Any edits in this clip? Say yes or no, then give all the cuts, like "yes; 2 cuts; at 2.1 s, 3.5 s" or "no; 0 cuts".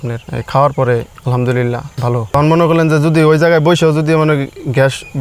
yes; 1 cut; at 2.3 s